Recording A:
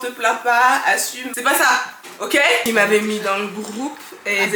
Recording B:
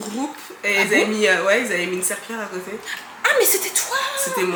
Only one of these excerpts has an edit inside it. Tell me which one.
A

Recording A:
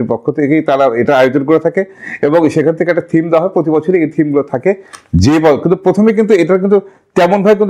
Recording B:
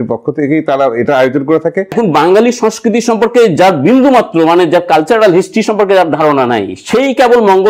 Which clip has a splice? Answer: B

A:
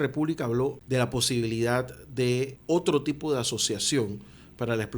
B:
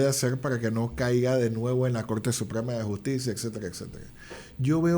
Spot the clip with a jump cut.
A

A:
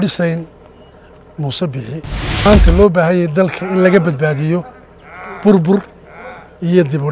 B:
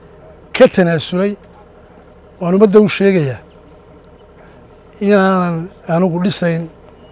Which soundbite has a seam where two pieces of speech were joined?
A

